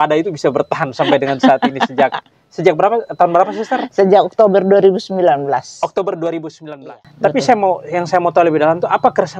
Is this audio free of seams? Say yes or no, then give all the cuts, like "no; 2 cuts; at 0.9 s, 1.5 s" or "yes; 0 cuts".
no; 1 cut; at 6.8 s